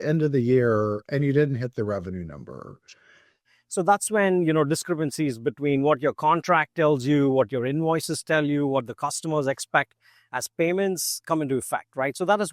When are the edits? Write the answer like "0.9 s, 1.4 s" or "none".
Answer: 3.4 s